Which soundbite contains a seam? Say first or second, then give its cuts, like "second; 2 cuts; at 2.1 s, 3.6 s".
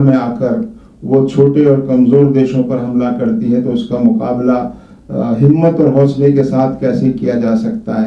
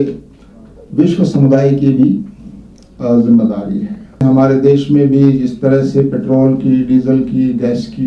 second; 1 cut; at 4.2 s